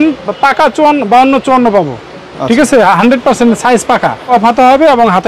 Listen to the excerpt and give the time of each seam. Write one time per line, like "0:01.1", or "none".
0:04.3